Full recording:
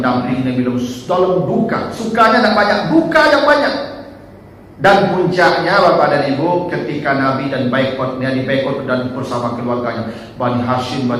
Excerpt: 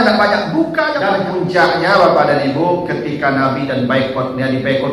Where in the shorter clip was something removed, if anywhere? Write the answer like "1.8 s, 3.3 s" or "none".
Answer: 1.0 s